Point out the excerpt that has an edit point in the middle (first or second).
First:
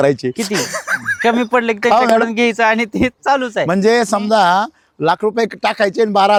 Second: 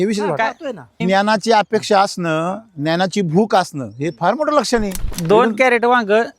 second